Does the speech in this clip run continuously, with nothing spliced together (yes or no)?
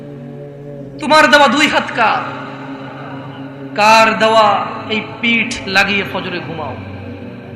no